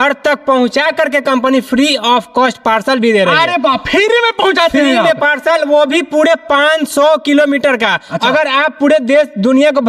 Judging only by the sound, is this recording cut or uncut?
uncut